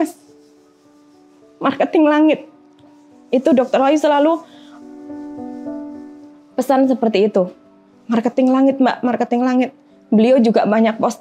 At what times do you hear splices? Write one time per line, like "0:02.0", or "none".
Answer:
none